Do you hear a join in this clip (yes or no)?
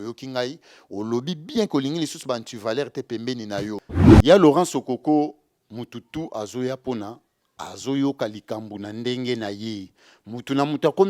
yes